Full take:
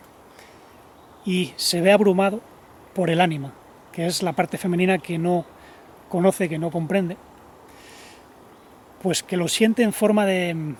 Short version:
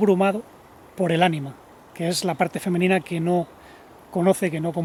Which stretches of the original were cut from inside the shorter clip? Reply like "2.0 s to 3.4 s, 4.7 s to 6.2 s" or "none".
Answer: none